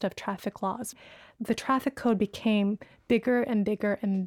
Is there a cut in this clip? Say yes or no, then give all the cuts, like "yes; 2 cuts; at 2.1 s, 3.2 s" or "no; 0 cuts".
yes; 1 cut; at 1.2 s